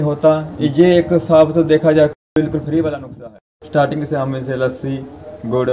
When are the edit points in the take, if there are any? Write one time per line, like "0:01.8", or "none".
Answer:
0:02.1
0:03.2